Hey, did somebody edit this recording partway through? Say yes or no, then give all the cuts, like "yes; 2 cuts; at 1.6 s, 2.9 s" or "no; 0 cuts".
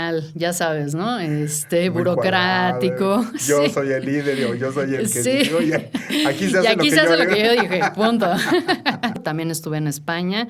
yes; 1 cut; at 9.2 s